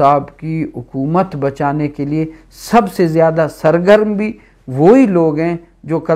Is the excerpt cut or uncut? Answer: uncut